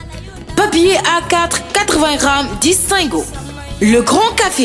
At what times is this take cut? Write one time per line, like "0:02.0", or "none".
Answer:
none